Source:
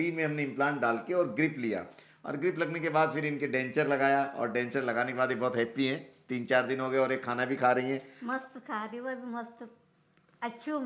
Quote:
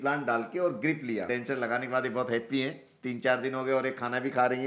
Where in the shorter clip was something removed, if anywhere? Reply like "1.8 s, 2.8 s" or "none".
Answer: 1.3 s